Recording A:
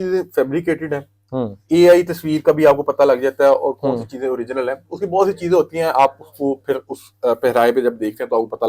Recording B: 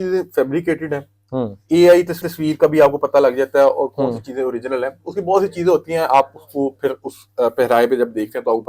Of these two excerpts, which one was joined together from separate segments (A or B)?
A